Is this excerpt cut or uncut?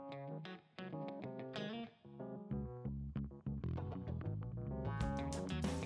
uncut